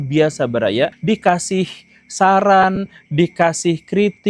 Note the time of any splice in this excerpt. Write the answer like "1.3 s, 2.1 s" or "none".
1.0 s